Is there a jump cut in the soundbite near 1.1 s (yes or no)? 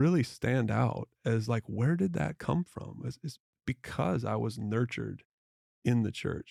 no